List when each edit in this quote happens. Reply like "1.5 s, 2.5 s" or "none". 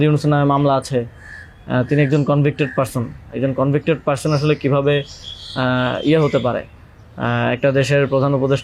none